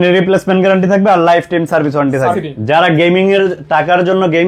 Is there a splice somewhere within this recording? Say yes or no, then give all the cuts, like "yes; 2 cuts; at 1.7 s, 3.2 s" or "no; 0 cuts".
yes; 1 cut; at 2.4 s